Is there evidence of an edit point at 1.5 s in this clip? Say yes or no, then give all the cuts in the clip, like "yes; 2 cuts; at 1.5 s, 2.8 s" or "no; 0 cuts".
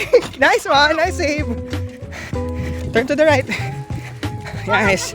yes; 2 cuts; at 1.5 s, 2.9 s